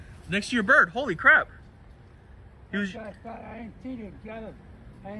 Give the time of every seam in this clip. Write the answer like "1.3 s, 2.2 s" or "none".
none